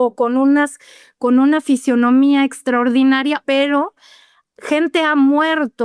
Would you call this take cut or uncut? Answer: cut